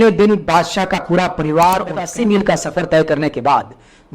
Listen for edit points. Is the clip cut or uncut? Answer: cut